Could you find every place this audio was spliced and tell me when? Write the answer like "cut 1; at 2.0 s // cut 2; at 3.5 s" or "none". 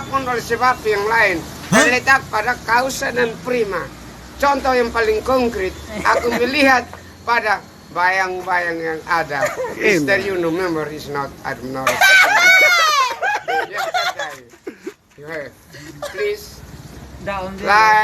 cut 1; at 1.8 s